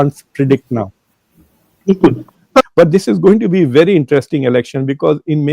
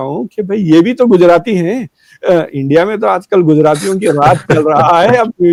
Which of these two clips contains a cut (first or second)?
first